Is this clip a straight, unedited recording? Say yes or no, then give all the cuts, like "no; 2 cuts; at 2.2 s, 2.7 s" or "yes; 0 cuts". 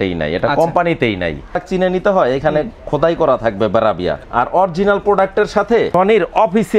no; 3 cuts; at 1.6 s, 4.2 s, 5.9 s